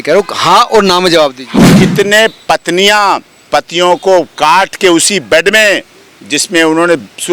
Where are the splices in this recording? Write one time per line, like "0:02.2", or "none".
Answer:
0:01.4